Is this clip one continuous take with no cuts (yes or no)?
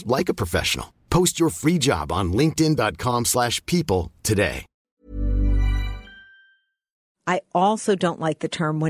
no